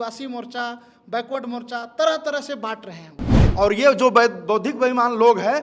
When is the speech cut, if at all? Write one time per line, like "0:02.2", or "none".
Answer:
0:03.4